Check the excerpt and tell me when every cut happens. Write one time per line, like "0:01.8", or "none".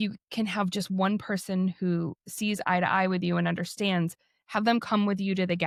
none